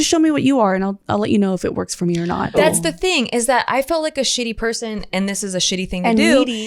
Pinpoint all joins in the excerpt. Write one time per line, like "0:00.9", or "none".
0:02.6